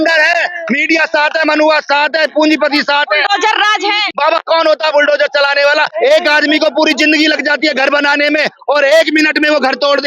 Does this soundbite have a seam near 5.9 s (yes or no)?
yes